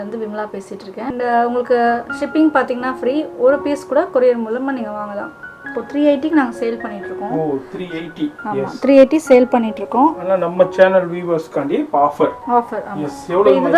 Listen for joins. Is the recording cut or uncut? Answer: cut